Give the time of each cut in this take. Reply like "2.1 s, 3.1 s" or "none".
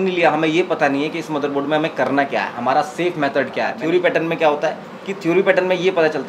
3.8 s